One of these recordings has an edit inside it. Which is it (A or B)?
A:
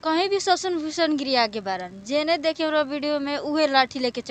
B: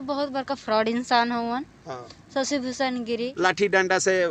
B